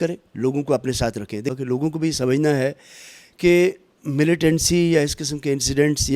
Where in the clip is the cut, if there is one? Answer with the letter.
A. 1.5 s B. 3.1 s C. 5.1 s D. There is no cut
A